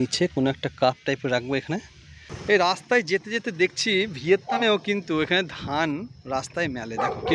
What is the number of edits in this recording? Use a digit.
1